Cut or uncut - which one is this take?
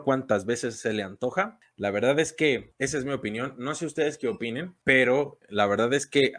cut